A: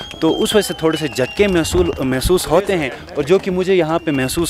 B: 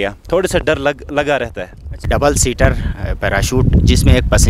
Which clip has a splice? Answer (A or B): B